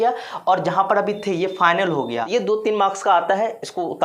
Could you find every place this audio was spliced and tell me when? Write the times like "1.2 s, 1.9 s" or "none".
2.2 s